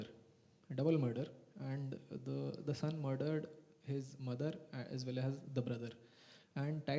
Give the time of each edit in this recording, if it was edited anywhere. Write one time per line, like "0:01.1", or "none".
none